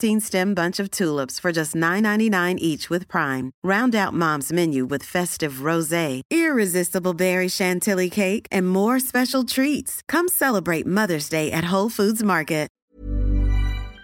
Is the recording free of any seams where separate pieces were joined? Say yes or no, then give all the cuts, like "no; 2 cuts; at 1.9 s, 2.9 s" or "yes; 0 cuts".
no; 1 cut; at 12.8 s